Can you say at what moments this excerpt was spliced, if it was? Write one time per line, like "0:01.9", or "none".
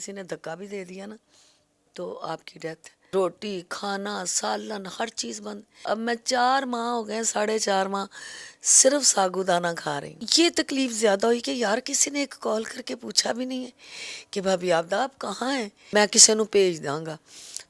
0:02.9
0:10.1
0:15.8

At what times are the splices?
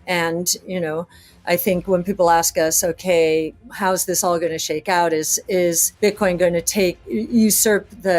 0:03.6
0:05.9

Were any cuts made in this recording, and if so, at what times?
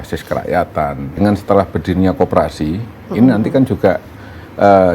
0:01.2

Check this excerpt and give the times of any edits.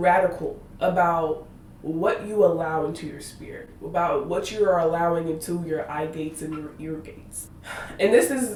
none

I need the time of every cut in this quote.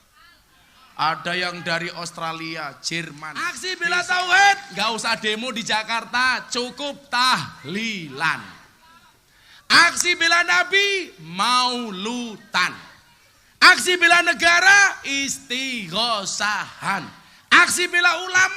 0:03.7

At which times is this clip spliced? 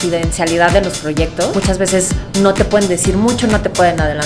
0:01.5

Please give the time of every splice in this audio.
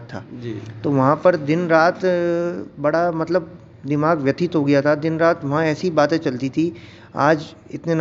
none

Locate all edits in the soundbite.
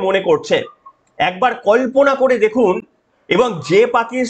none

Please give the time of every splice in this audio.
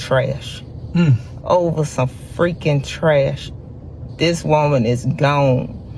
none

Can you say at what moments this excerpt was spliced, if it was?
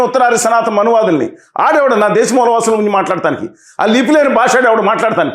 none

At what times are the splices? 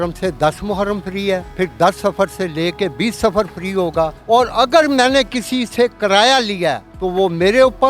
0:01.5
0:04.2
0:06.9

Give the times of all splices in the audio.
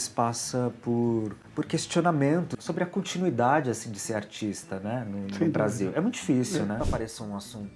0:02.6
0:06.8

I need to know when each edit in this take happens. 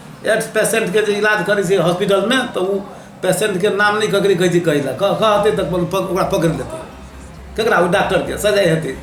none

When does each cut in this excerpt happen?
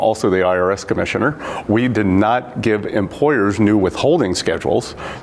0:02.1
0:03.1

